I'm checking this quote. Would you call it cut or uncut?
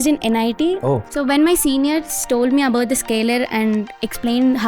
cut